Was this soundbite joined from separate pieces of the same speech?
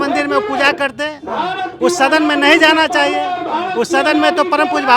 no; 0 cuts

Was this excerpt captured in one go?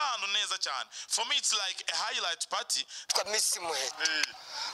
no; 1 cut; at 3.1 s

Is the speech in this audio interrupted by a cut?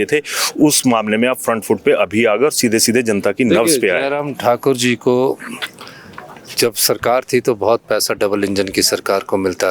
no; 0 cuts

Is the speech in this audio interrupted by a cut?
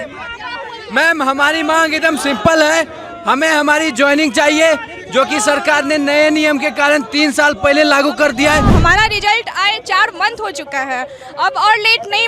yes; 1 cut; at 8.7 s

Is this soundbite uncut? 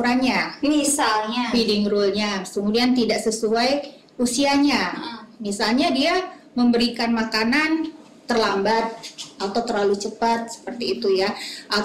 yes; 0 cuts

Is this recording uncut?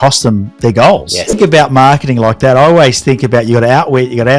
no; 1 cut; at 1.4 s

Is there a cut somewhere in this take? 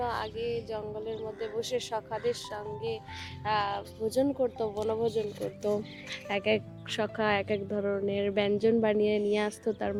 no; 0 cuts

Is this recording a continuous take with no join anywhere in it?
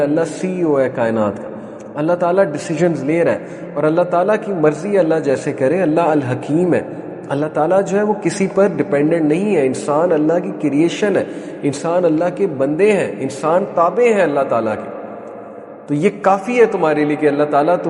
yes; 0 cuts

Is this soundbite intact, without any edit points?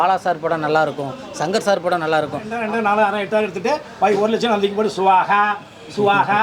no; 1 cut; at 2.5 s

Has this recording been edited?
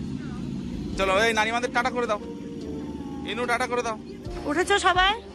no; 0 cuts

